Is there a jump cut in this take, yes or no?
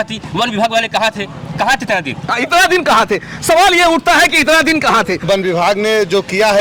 yes